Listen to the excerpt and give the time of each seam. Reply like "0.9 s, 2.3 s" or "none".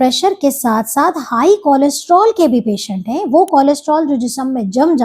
none